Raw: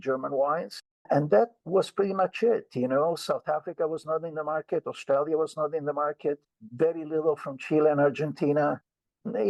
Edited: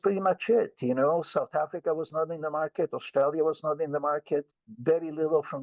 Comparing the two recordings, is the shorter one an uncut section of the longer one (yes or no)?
yes